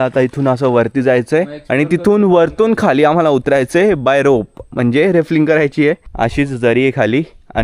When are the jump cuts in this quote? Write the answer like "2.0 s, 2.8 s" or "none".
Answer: 6.1 s